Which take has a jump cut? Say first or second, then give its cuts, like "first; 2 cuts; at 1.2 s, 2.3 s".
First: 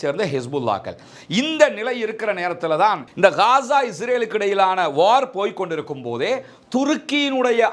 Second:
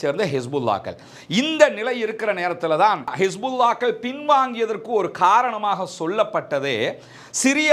second; 1 cut; at 3.1 s